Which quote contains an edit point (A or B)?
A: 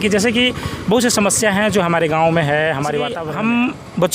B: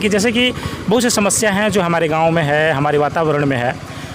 A